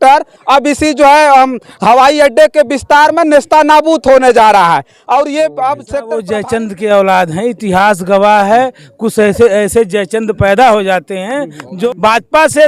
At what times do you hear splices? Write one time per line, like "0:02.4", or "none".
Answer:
0:06.0
0:11.7